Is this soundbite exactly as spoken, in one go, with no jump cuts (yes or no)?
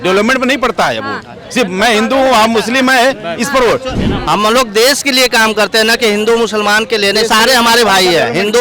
no